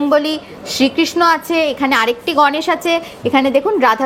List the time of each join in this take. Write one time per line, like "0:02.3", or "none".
none